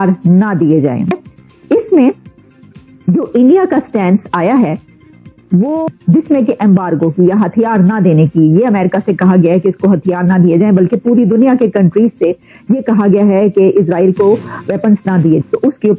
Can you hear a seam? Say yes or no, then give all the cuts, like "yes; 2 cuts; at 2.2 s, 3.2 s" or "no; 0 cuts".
yes; 1 cut; at 1.1 s